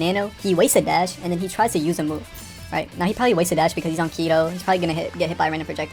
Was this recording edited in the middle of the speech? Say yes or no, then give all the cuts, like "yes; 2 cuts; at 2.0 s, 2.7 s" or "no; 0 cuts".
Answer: no; 0 cuts